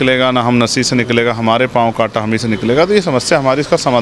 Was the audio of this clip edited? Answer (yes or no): no